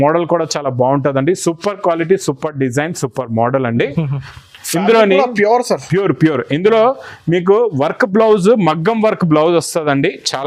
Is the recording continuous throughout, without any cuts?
yes; 0 cuts

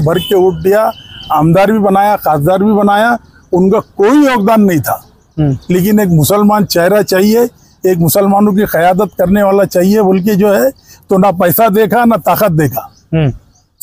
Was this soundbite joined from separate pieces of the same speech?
no; 0 cuts

